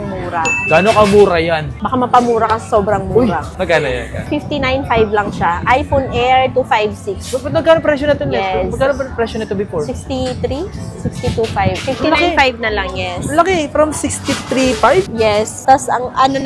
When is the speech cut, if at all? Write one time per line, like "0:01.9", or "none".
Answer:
none

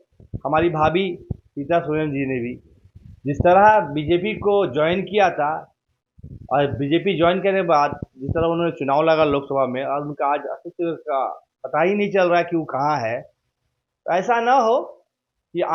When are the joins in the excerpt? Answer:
none

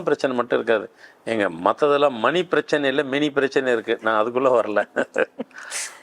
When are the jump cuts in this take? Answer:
none

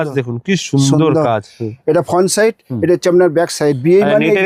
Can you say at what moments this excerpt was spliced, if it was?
none

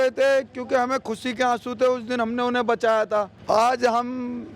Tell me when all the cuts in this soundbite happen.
0:03.3

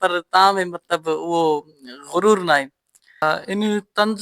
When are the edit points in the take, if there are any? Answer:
0:03.2

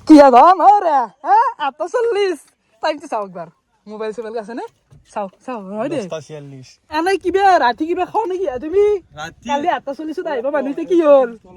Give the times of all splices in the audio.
0:06.8

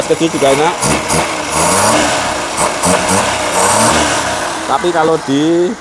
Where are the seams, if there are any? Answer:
none

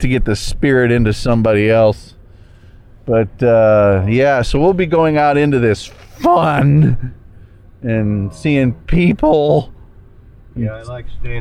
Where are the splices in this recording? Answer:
none

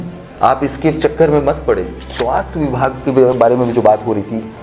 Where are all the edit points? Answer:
0:02.1

